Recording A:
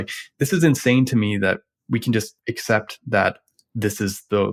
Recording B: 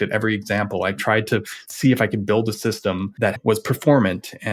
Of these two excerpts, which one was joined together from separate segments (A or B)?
B